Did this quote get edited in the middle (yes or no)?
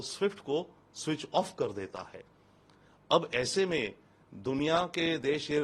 no